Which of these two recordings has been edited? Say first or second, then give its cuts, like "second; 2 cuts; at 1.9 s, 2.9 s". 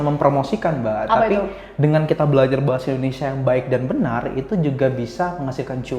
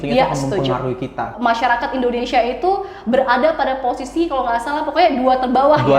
second; 1 cut; at 1.3 s